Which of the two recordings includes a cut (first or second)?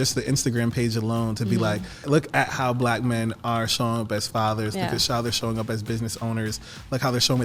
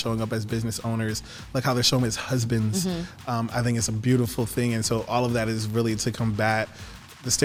first